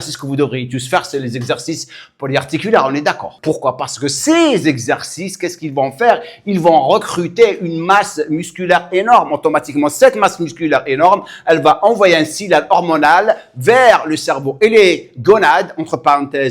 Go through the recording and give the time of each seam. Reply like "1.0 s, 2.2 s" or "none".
3.3 s